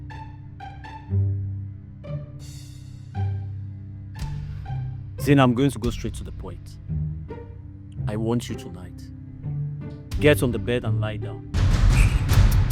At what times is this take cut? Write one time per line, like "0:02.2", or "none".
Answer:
0:11.5